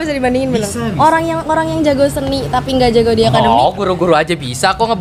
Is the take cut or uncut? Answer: uncut